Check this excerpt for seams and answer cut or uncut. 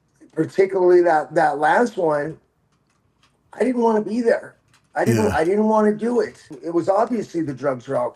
cut